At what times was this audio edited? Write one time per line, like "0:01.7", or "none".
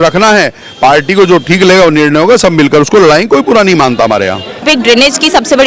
0:04.6